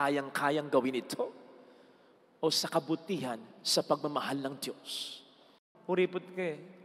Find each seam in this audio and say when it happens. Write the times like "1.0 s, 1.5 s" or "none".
5.7 s